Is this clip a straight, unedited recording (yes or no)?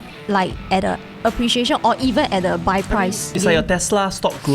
no